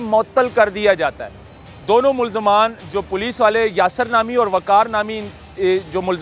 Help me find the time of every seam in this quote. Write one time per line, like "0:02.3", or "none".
0:01.7